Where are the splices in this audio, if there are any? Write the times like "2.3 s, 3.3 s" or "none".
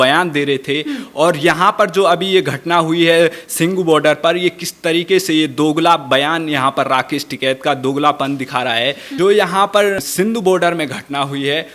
9.0 s, 10.0 s